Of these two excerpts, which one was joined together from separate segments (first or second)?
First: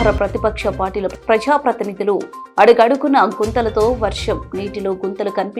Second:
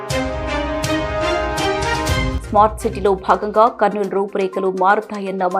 second